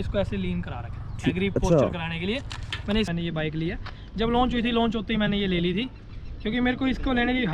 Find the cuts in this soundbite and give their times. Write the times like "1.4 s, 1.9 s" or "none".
3.1 s